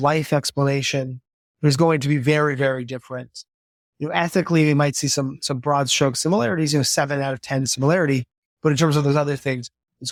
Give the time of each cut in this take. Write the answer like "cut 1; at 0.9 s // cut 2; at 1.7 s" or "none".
none